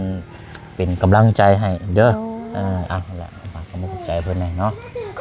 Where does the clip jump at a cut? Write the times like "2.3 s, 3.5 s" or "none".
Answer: none